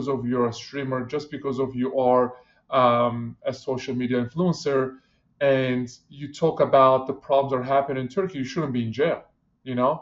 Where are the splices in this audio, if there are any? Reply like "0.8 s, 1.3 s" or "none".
none

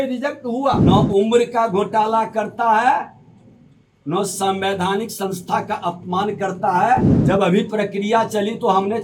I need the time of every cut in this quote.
0.8 s, 7.1 s

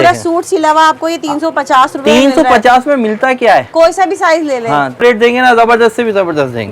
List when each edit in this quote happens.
5.0 s

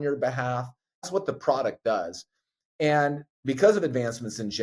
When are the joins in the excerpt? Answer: 1.1 s

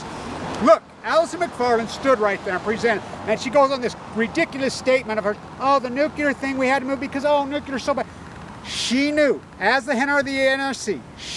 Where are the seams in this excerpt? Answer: 2.2 s

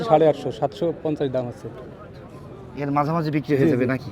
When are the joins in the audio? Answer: none

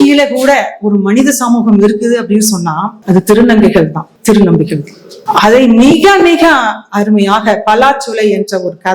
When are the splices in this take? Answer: 2.9 s, 4.1 s, 5.1 s

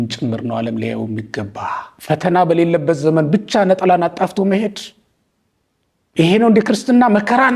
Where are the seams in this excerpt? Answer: 1.9 s

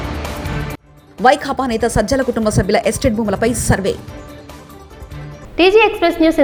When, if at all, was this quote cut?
none

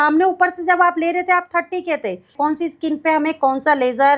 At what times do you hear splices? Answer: 2.3 s

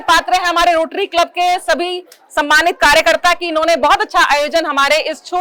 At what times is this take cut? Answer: none

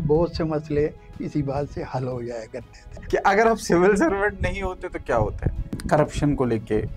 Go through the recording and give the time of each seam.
3.0 s, 5.6 s

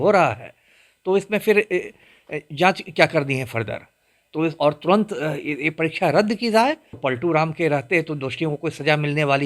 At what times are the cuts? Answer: 7.0 s

